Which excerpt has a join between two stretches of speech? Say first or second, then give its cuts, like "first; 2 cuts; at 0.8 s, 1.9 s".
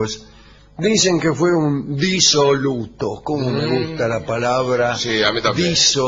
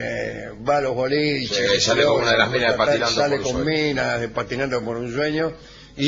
first; 1 cut; at 2.4 s